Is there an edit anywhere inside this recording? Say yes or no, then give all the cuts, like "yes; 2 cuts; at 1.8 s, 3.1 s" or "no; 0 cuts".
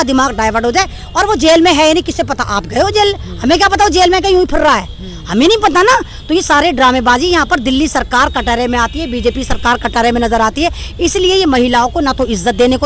no; 0 cuts